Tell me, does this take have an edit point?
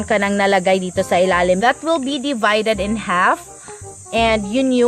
yes; 1 cut; at 1.6 s

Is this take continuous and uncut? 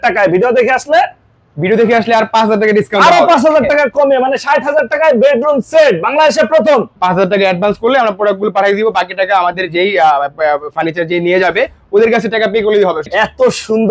no; 2 cuts; at 6.9 s, 13.1 s

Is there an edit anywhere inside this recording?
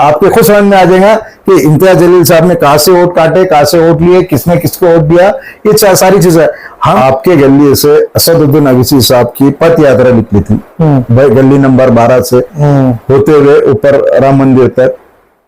yes; 1 cut; at 6.9 s

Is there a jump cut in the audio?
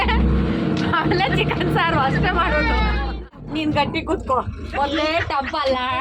yes; 1 cut; at 3.5 s

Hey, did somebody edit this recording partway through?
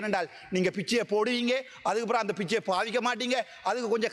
no; 0 cuts

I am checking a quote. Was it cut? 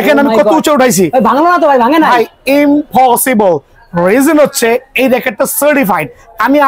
no; 0 cuts

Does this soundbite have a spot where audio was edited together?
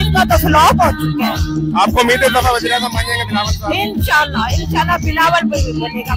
no; 0 cuts

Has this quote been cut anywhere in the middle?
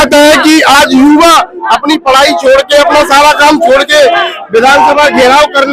no; 0 cuts

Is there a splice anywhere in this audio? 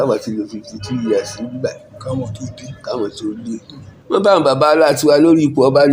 yes; 1 cut; at 4.2 s

